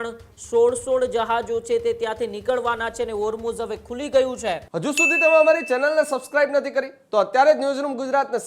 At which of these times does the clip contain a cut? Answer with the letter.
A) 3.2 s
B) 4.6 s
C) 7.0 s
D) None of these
B